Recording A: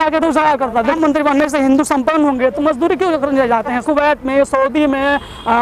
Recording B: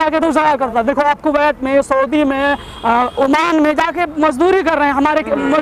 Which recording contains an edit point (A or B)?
A